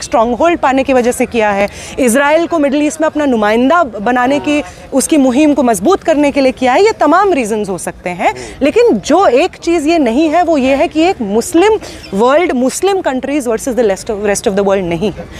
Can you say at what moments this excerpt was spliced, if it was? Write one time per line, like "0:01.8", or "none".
none